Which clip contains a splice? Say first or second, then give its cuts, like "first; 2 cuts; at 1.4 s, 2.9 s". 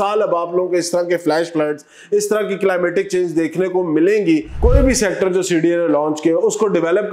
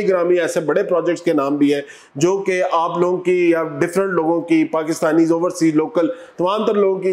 first; 1 cut; at 4.6 s